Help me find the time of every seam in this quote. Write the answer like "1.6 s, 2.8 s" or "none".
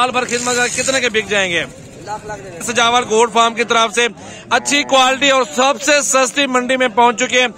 2.7 s